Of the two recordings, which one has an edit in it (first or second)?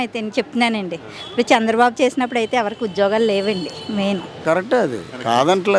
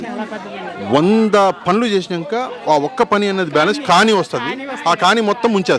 first